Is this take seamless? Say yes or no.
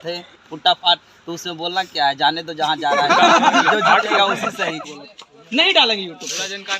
no